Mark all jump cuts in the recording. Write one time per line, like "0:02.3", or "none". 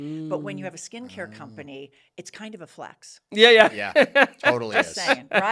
none